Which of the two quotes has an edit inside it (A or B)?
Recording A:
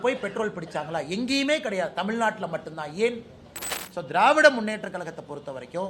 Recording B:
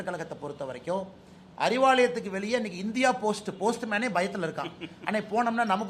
A